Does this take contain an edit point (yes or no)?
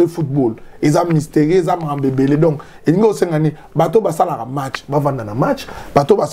no